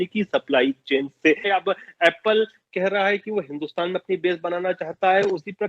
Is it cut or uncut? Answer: cut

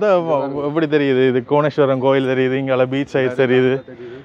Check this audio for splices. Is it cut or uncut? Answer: uncut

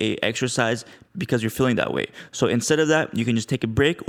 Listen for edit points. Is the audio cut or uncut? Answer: uncut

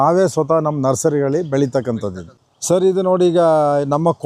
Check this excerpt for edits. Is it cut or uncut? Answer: cut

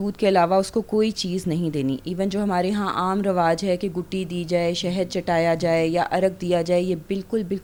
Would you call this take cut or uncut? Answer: uncut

